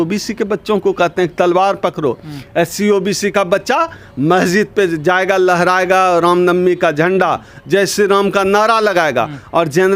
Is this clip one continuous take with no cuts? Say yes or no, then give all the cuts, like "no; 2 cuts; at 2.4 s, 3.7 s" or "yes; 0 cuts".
yes; 0 cuts